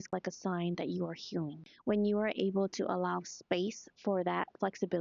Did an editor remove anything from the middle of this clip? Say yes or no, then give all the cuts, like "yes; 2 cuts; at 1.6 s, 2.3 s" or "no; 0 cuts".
yes; 1 cut; at 1.7 s